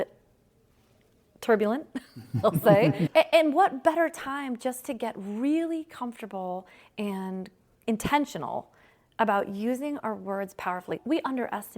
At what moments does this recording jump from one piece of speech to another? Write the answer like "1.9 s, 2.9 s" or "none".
3.1 s, 11.0 s